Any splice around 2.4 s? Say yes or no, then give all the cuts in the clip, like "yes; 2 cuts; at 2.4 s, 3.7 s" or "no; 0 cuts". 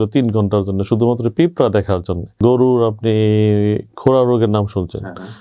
yes; 1 cut; at 2.4 s